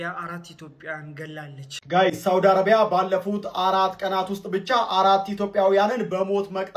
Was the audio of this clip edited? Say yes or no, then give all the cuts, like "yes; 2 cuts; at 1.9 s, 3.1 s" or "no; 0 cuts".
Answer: yes; 1 cut; at 1.7 s